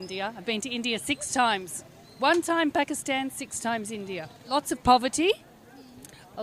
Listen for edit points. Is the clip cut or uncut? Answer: cut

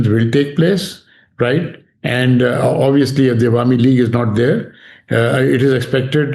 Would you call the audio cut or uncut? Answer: uncut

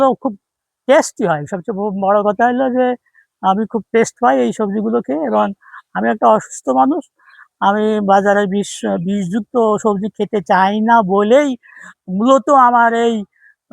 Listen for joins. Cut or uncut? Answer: uncut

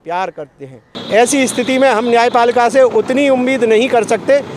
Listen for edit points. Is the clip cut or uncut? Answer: cut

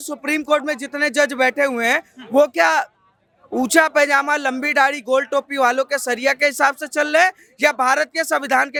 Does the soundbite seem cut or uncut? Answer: uncut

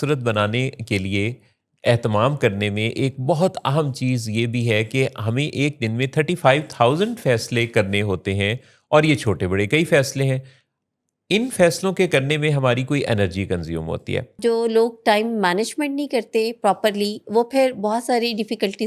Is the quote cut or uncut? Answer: cut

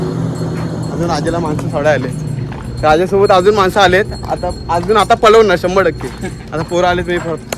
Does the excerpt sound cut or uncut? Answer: uncut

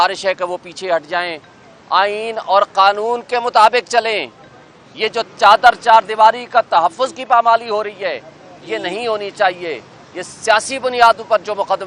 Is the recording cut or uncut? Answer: uncut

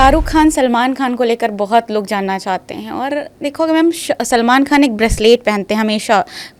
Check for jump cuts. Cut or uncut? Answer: uncut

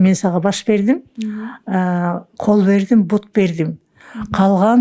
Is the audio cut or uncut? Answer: uncut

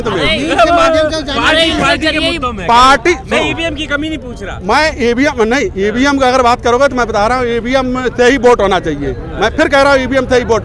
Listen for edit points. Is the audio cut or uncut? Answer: uncut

